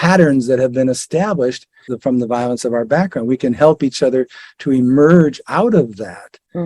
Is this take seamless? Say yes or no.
no